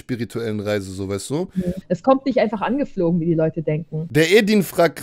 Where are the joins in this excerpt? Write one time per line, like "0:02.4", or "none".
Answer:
0:01.8
0:04.0